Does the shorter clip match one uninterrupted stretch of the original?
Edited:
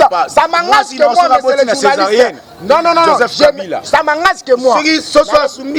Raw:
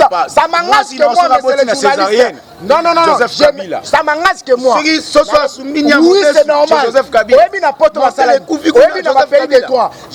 yes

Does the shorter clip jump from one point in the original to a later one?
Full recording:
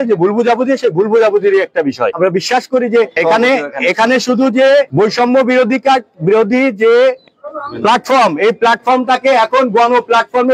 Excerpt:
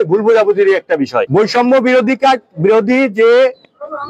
yes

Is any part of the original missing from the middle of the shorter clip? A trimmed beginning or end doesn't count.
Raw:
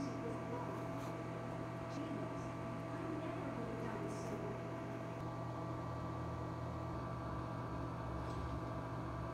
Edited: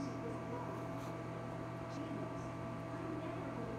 no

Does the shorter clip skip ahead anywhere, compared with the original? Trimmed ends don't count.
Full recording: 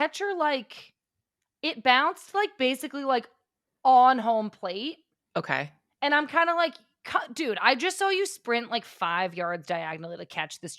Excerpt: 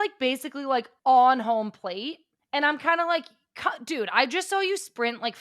yes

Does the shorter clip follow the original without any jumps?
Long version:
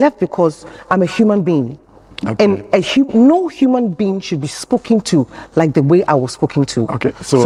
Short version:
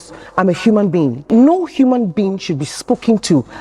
no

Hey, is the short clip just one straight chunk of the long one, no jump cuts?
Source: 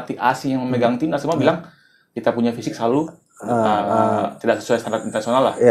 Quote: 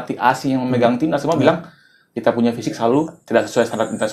no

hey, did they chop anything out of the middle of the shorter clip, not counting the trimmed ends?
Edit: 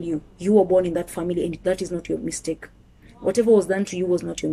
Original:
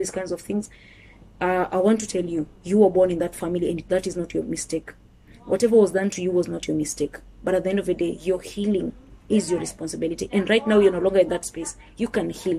no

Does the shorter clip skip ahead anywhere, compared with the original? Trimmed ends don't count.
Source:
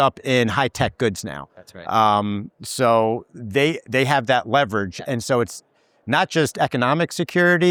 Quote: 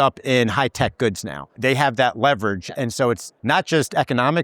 yes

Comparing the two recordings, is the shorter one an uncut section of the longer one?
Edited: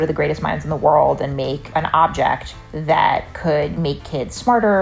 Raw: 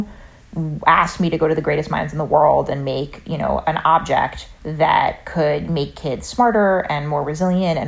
no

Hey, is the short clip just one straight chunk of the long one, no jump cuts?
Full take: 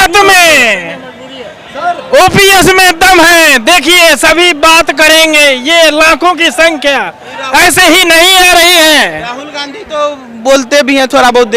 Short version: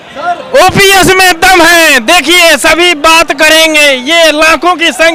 yes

